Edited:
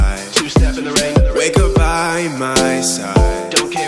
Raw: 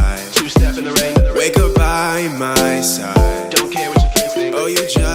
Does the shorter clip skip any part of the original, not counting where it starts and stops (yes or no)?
no